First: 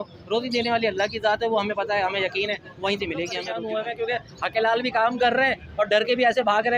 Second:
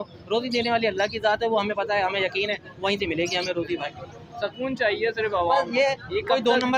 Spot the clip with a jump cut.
first; 1 cut; at 3.5 s

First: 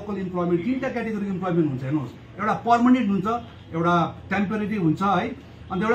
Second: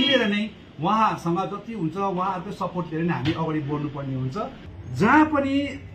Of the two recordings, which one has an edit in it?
second; 1 cut; at 4.6 s

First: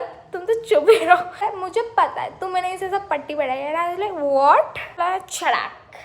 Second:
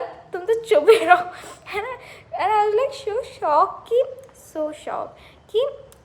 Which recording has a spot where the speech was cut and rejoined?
first; 2 cuts; at 1.4 s, 5.0 s

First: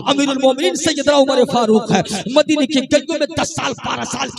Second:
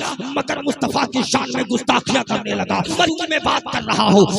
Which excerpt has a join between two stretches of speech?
second; 1 cut; at 3.0 s

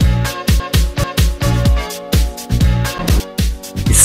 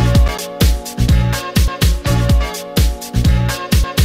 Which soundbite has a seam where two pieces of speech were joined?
first; 1 cut; at 1.0 s

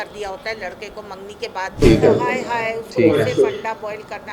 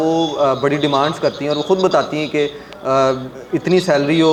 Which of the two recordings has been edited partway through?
first; 1 cut; at 1.8 s

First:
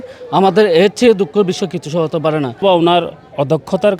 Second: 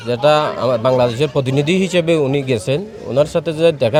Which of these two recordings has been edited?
first; 1 cut; at 2.6 s

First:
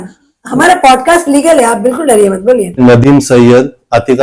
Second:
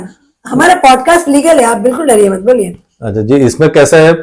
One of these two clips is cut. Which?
first; 1 cut; at 2.8 s

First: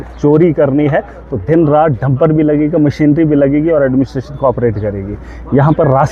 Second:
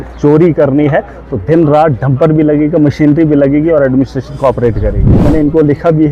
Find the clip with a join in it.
second; 1 cut; at 5.1 s

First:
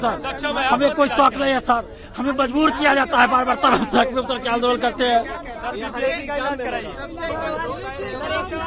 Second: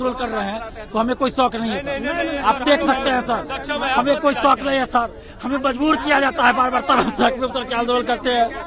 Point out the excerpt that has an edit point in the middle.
first; 1 cut; at 7.3 s

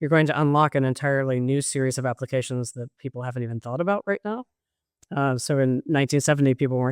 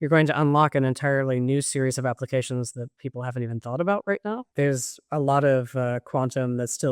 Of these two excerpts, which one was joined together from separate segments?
second; 1 cut; at 4.5 s

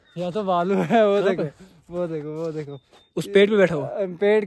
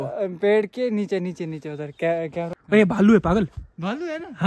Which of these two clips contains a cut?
second; 1 cut; at 2.5 s

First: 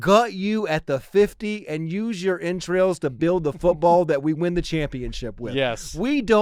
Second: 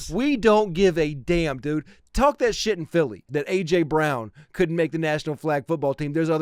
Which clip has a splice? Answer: second; 1 cut; at 3.3 s

